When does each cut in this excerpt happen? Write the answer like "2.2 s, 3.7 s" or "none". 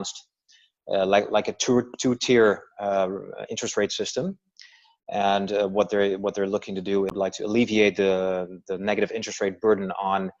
7.1 s